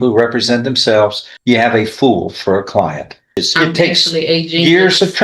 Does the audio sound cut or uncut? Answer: cut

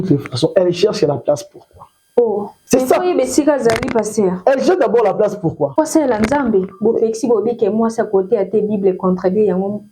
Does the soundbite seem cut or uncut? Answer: cut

